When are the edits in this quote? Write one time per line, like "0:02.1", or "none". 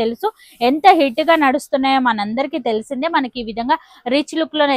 none